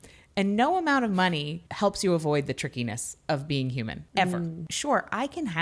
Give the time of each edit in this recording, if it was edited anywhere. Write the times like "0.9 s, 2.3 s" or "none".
1.6 s, 4.0 s, 4.7 s